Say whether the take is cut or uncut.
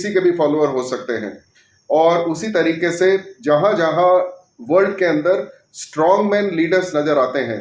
uncut